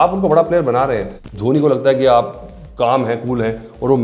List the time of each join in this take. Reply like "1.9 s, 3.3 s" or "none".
1.3 s